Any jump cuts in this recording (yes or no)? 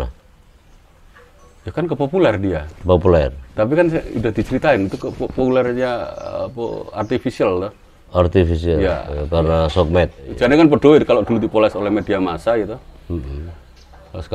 yes